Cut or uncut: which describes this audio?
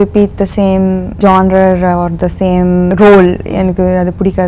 cut